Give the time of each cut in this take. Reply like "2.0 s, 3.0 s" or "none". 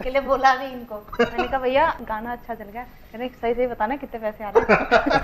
2.0 s